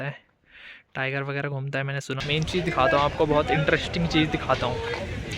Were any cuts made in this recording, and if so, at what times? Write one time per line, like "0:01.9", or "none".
0:02.2